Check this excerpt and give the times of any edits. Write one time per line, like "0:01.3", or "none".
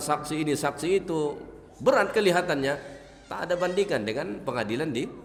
none